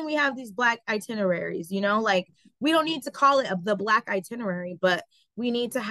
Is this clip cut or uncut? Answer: uncut